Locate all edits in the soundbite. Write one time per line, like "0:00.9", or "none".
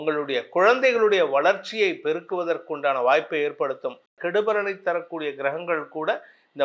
0:04.1